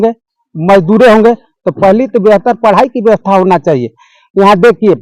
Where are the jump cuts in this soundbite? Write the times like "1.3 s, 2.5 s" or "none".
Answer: none